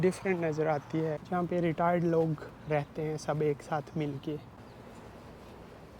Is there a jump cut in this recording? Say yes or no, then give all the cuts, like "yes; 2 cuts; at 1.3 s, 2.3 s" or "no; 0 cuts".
yes; 2 cuts; at 1.2 s, 4.5 s